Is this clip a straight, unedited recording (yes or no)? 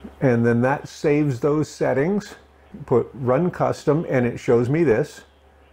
no